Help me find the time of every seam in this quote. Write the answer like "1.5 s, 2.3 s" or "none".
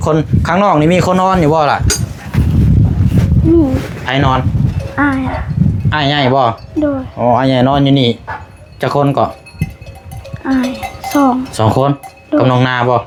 none